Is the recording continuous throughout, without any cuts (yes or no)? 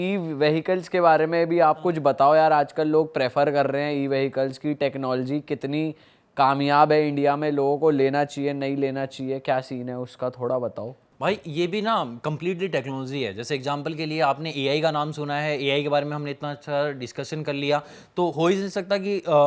yes